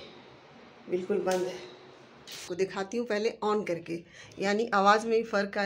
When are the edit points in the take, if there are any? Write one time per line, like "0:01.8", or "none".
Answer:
0:02.4